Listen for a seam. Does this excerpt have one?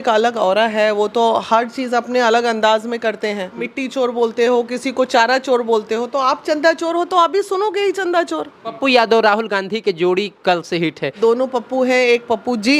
yes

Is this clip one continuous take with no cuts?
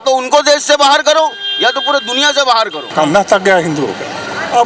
no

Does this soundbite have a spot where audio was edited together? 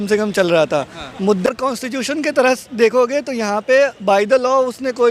yes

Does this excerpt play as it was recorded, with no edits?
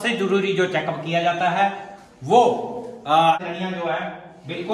no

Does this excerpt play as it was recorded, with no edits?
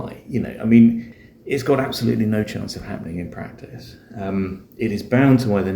no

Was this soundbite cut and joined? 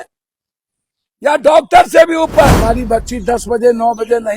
yes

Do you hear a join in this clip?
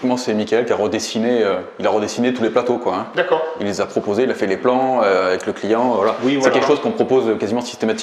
no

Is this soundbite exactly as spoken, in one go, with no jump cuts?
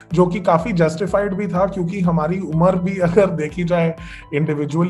yes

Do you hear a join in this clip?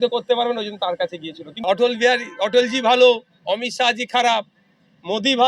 yes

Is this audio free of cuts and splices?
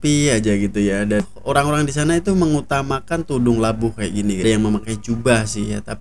no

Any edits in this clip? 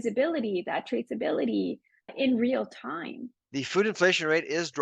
yes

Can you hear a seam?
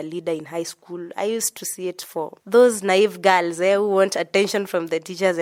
no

